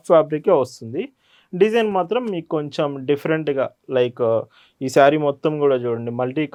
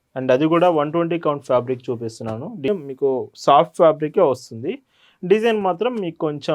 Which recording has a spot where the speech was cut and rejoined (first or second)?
second